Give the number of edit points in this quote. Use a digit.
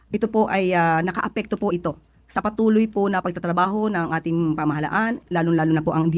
1